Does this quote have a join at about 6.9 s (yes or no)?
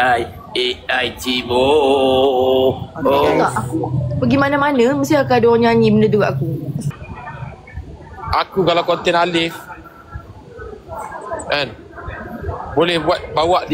yes